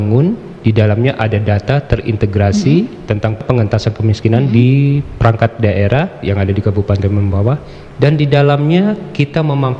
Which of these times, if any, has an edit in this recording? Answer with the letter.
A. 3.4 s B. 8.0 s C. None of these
A